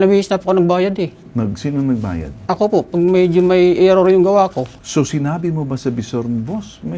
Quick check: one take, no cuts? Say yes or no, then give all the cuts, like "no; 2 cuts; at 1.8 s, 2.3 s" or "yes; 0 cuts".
yes; 0 cuts